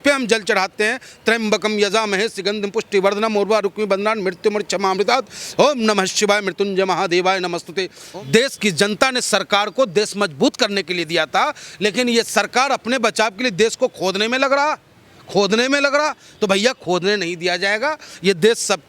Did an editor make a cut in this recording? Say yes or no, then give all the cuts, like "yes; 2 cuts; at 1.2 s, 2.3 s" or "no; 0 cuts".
yes; 1 cut; at 7.9 s